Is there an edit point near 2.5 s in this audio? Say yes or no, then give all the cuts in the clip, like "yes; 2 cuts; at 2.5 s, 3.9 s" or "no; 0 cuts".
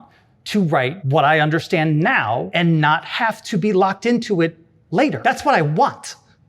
yes; 3 cuts; at 1.0 s, 2.5 s, 5.2 s